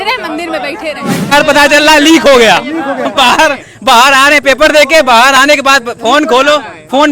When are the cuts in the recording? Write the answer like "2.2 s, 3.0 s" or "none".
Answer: 1.3 s